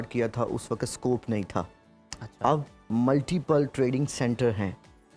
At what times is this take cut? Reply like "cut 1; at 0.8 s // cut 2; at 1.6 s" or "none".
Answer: none

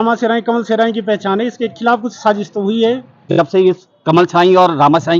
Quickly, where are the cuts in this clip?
cut 1; at 3.3 s

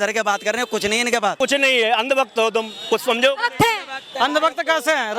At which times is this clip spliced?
cut 1; at 1.4 s

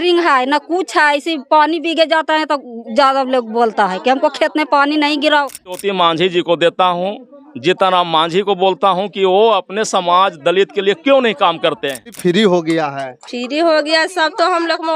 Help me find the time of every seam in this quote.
cut 1; at 5.8 s // cut 2; at 12.2 s

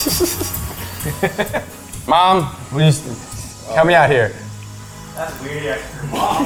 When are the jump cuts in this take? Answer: none

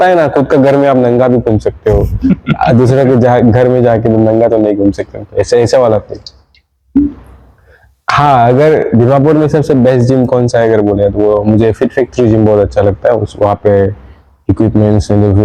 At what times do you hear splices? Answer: none

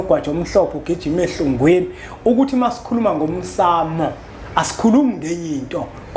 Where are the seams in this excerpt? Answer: none

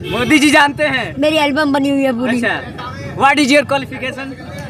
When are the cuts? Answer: none

